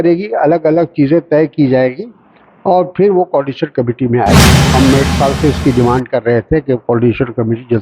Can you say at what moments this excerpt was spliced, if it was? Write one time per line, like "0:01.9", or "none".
0:04.5